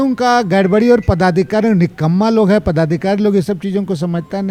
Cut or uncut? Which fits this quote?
uncut